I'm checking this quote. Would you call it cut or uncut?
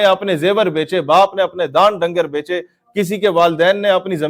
uncut